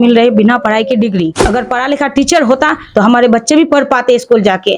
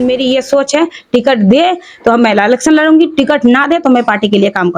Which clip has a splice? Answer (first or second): first